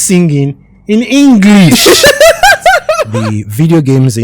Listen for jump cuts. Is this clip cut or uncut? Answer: cut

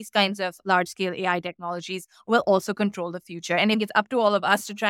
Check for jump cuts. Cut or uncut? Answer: cut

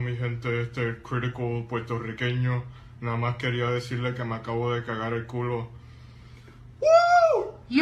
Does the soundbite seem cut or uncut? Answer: uncut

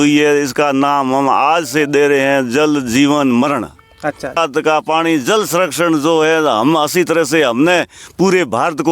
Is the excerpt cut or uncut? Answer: cut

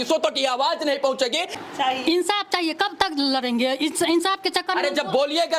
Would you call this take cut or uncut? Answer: cut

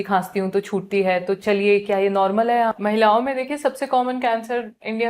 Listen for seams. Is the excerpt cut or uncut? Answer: cut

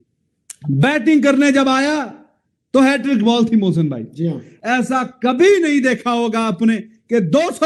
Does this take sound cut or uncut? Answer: cut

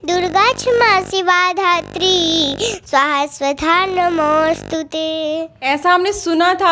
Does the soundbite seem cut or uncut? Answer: uncut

